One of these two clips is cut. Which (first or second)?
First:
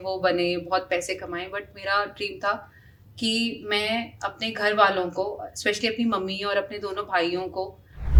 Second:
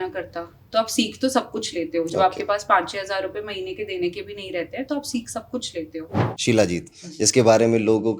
second